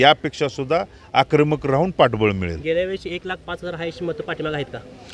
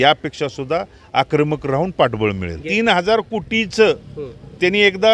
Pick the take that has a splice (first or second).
second